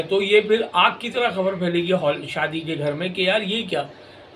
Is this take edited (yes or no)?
no